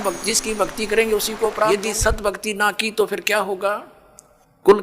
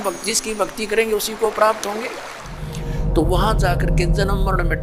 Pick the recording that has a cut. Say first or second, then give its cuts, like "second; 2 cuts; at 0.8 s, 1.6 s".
first; 1 cut; at 1.8 s